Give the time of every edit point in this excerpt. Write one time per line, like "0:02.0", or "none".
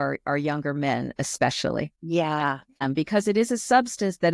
0:02.0
0:02.8